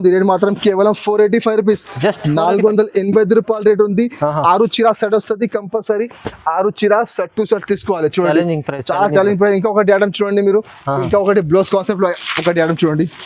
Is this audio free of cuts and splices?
yes; 0 cuts

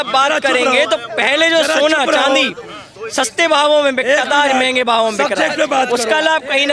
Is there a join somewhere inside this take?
no; 0 cuts

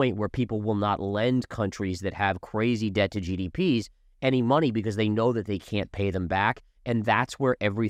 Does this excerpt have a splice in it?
no; 0 cuts

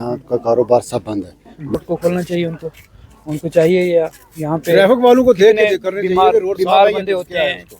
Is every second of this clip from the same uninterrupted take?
no; 1 cut; at 1.7 s

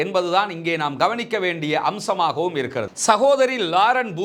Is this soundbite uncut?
no; 1 cut; at 2.9 s

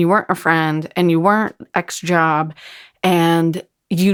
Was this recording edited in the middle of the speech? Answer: no; 0 cuts

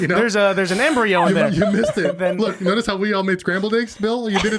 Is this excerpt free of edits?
yes; 0 cuts

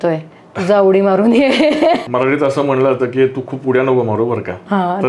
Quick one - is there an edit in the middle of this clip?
yes; 1 cut; at 2.0 s

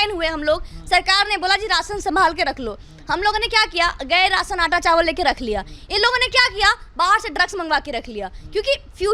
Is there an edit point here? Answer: no; 0 cuts

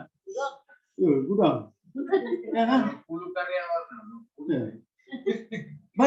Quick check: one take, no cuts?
yes; 0 cuts

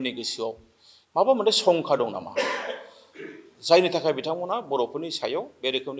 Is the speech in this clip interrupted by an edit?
no; 0 cuts

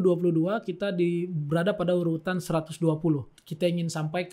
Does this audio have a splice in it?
yes; 1 cut; at 3.4 s

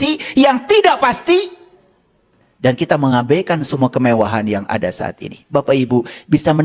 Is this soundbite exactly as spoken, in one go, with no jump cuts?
yes; 0 cuts

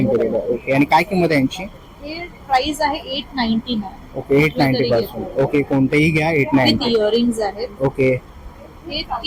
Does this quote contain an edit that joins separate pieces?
no; 0 cuts

